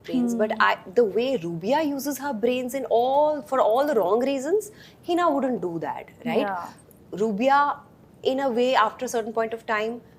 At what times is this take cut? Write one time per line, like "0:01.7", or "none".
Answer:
none